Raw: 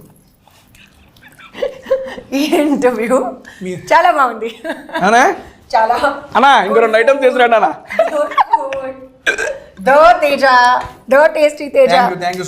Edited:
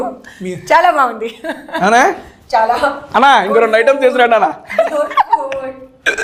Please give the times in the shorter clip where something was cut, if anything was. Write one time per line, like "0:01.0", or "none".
none